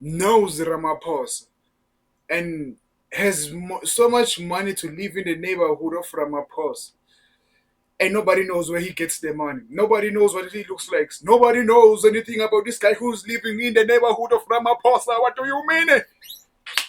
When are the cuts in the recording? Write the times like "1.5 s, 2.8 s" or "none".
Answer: none